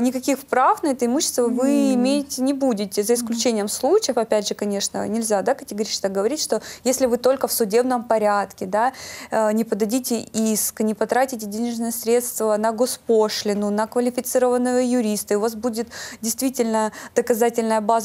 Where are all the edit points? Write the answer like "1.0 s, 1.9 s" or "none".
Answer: none